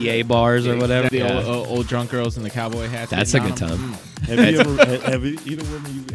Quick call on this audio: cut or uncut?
cut